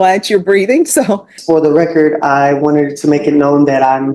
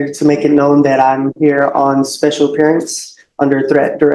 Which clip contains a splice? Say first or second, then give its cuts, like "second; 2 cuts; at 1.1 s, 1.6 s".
first; 1 cut; at 1.3 s